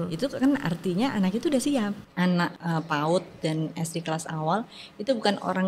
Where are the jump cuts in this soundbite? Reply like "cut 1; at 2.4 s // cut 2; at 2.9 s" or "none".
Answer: cut 1; at 2.3 s